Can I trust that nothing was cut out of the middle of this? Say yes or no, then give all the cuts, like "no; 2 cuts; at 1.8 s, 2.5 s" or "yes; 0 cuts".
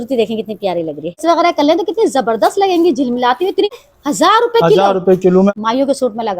no; 3 cuts; at 1.2 s, 3.7 s, 5.5 s